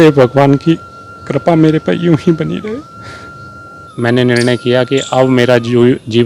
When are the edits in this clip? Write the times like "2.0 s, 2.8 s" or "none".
3.8 s